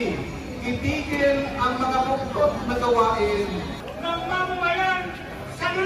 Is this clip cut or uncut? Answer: cut